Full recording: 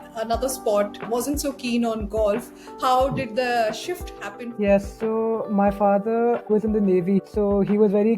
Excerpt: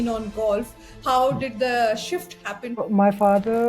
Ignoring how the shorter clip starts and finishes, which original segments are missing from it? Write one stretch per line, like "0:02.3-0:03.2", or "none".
0:04.5-0:05.4